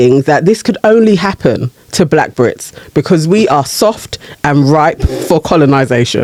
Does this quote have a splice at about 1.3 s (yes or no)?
no